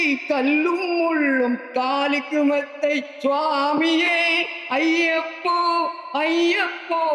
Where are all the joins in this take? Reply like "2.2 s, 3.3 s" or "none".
none